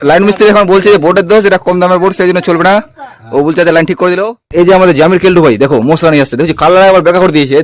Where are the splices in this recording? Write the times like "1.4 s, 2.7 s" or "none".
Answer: 4.3 s